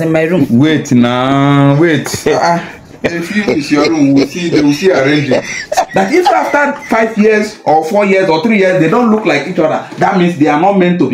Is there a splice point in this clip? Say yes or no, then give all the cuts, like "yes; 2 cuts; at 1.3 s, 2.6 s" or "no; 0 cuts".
yes; 1 cut; at 5.7 s